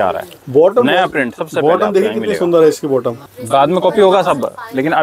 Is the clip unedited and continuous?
no; 1 cut; at 3.3 s

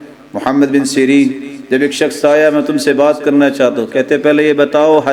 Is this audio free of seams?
yes; 0 cuts

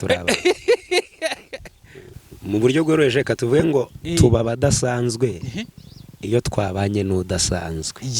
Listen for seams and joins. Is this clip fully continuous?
no; 1 cut; at 2.0 s

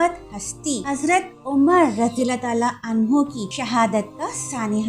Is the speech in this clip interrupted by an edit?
yes; 2 cuts; at 0.8 s, 3.5 s

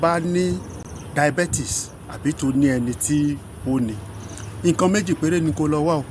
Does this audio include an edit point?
yes; 1 cut; at 0.9 s

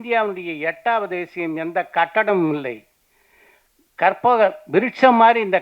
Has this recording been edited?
no; 0 cuts

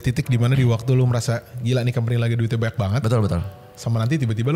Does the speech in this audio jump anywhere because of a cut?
no; 0 cuts

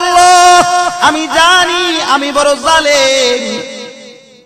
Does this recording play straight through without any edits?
yes; 0 cuts

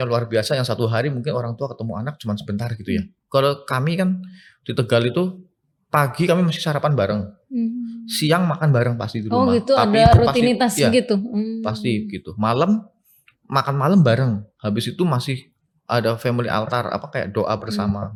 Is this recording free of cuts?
yes; 0 cuts

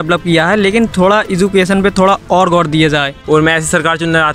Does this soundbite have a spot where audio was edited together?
yes; 1 cut; at 3.1 s

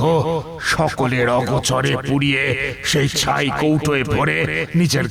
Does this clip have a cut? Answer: no; 0 cuts

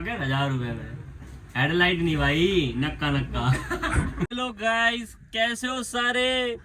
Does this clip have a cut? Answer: yes; 1 cut; at 4.3 s

